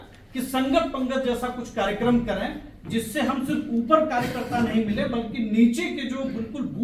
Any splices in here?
no; 0 cuts

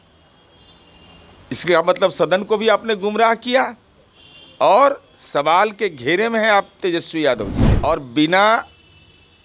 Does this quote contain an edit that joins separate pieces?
yes; 1 cut; at 7.6 s

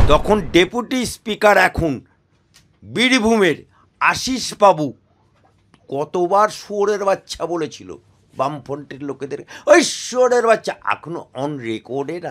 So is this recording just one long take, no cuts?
yes; 0 cuts

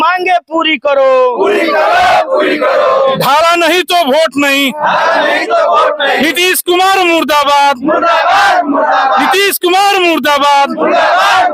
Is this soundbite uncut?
yes; 0 cuts

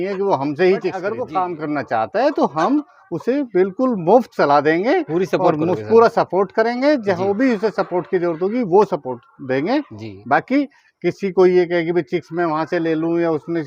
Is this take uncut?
no; 1 cut; at 1.1 s

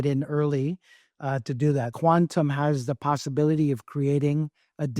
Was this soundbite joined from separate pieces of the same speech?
yes; 1 cut; at 1.9 s

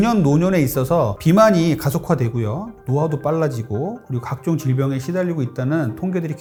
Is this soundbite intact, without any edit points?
yes; 0 cuts

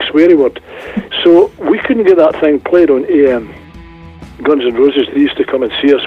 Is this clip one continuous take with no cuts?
no; 1 cut; at 3.7 s

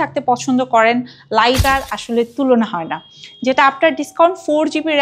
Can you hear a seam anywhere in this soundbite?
yes; 1 cut; at 1.6 s

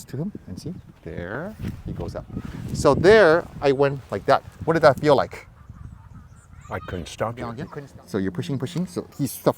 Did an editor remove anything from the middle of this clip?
yes; 1 cut; at 7.6 s

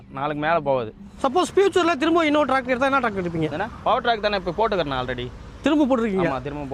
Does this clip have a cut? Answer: yes; 1 cut; at 1.1 s

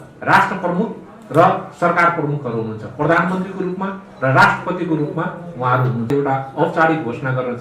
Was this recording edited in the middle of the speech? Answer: yes; 1 cut; at 6.1 s

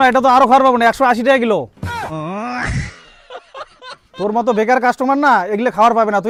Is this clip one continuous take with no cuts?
yes; 0 cuts

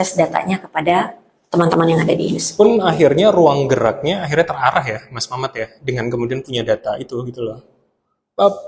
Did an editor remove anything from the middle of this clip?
no; 0 cuts

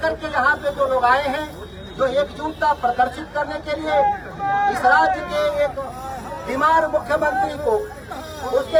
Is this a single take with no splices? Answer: yes; 0 cuts

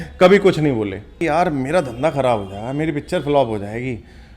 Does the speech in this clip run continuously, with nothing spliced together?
no; 1 cut; at 1.2 s

